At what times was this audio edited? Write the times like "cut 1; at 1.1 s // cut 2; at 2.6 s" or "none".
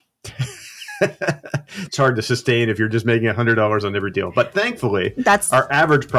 none